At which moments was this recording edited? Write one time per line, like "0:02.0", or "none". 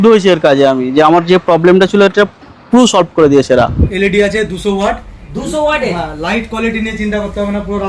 0:03.9